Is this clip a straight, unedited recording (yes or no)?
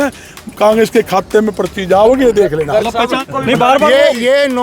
no